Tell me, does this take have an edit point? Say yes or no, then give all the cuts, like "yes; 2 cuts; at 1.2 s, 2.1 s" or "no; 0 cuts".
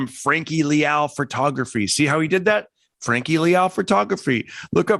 no; 0 cuts